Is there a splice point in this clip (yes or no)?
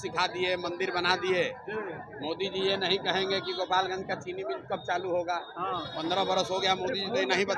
no